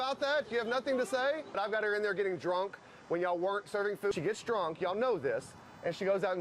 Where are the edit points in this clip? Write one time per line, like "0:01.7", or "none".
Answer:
0:01.5
0:04.1